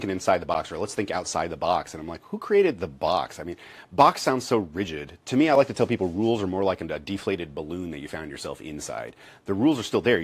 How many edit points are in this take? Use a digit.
0